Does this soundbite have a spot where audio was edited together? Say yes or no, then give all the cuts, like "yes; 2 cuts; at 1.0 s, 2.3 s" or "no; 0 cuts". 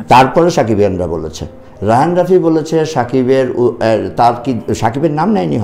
no; 0 cuts